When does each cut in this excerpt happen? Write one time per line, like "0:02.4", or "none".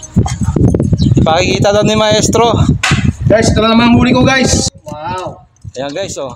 0:04.7